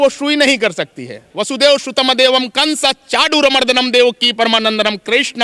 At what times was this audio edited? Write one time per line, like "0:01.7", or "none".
0:01.3